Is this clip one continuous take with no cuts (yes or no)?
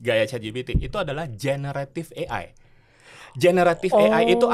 yes